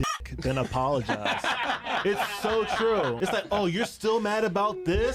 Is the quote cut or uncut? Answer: cut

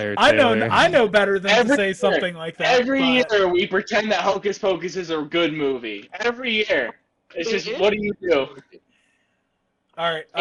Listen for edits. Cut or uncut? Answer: uncut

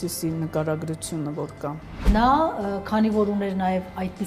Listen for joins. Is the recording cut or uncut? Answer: cut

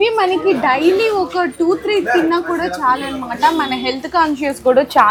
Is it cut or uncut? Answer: uncut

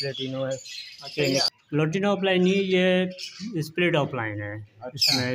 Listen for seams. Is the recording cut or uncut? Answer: cut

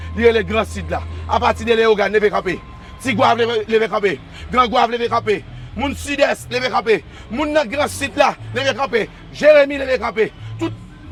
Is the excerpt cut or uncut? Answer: uncut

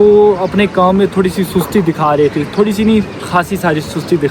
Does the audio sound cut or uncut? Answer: uncut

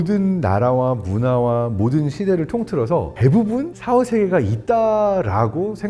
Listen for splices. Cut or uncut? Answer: cut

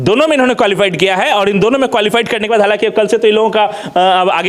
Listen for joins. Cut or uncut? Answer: uncut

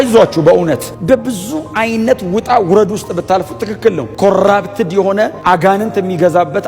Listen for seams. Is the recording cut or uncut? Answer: cut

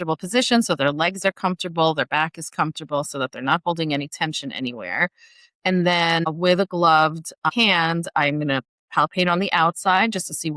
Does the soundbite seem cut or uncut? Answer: cut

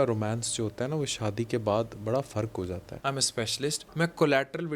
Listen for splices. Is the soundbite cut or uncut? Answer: cut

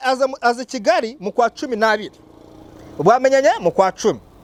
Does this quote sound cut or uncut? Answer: uncut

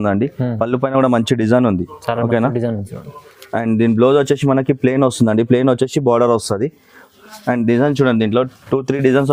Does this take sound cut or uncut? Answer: uncut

